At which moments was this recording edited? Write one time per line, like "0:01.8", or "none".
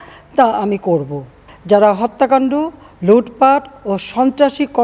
0:01.4

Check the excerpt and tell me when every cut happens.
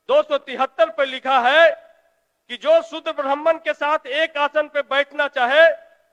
none

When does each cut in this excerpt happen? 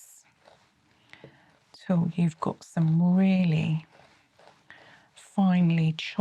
none

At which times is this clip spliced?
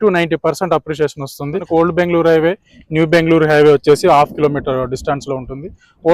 0:01.6

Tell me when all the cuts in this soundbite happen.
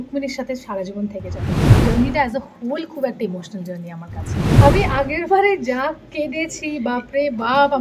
0:01.7
0:04.4

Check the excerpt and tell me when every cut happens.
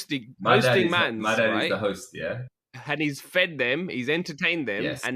none

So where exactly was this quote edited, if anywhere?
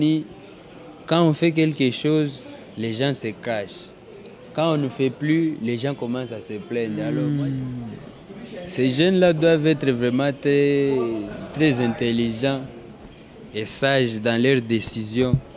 0:07.1

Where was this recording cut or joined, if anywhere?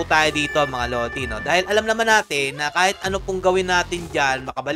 none

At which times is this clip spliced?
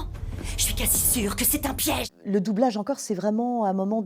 0:02.0

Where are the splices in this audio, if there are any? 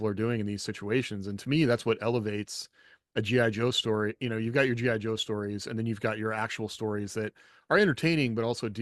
none

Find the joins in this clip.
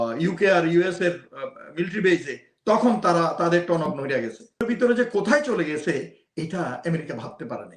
0:04.6

